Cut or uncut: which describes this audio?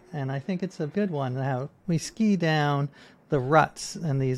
cut